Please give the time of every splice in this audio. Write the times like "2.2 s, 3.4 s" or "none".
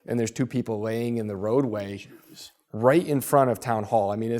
none